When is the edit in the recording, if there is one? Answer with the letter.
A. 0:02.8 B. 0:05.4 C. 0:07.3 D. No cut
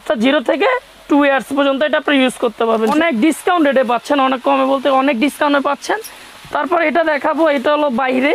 A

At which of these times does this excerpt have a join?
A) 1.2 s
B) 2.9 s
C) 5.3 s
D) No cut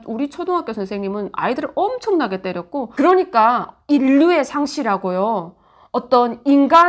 B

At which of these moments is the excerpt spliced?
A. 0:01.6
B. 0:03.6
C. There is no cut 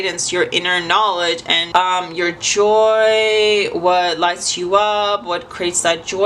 A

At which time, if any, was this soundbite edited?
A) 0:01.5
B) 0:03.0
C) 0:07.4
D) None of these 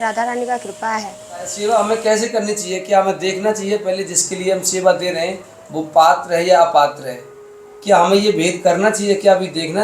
A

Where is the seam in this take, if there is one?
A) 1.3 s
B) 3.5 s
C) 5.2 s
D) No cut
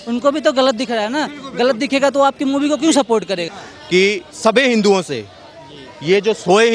B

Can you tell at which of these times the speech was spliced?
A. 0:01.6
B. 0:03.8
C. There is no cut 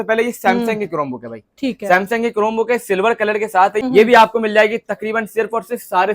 B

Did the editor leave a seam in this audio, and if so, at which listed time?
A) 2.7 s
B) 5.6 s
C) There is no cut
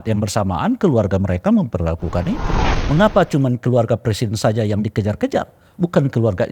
A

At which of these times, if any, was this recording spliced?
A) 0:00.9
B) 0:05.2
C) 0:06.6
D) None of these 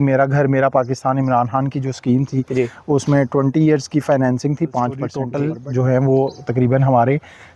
B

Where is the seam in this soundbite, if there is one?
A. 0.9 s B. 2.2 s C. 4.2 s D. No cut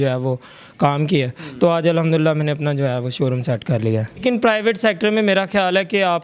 C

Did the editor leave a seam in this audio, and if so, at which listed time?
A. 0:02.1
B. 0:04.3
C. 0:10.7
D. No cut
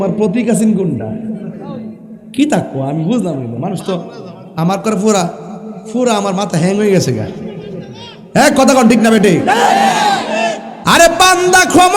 C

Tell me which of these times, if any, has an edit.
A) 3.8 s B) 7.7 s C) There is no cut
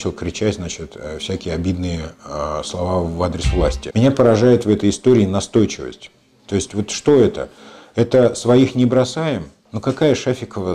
A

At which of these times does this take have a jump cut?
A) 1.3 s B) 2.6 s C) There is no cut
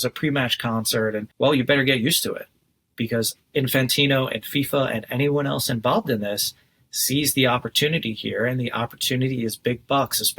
A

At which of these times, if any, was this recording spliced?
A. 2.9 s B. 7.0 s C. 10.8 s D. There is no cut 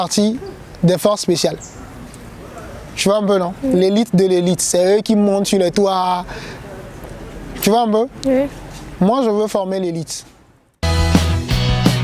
C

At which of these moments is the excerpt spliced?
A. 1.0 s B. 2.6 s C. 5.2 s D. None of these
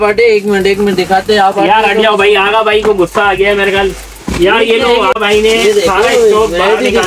C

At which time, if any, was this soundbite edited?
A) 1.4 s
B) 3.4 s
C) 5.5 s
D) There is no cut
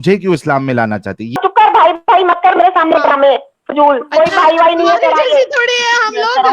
A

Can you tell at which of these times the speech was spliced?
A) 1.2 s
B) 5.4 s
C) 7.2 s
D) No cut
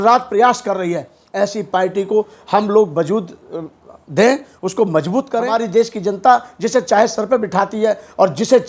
B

